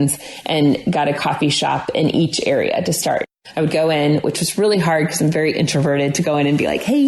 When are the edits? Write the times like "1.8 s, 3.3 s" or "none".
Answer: 3.2 s